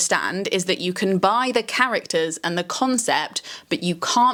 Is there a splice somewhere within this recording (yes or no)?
no